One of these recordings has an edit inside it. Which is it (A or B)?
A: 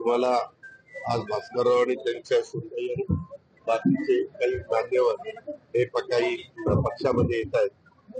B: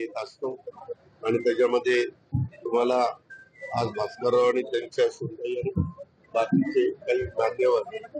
B